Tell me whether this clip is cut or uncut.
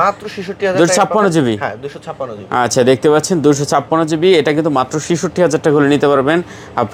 uncut